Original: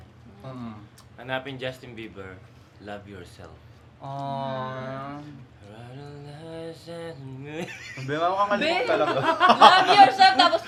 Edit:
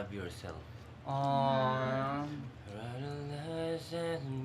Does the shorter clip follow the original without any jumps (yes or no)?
yes